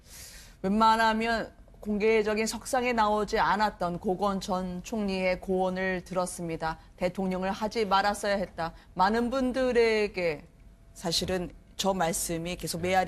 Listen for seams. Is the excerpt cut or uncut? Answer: uncut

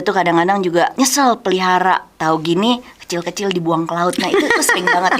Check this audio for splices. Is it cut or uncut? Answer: cut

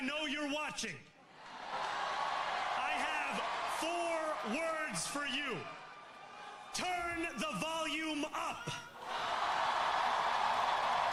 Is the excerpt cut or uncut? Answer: uncut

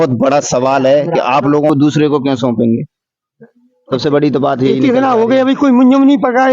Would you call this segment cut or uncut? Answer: cut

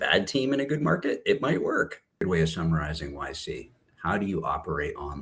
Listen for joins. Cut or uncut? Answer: cut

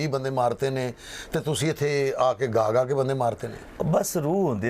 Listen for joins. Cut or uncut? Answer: uncut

